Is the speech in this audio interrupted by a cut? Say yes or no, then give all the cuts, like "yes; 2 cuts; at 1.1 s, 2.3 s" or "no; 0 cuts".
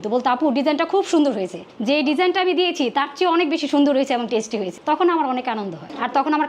no; 0 cuts